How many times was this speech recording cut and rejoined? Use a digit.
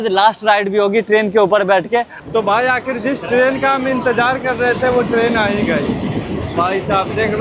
1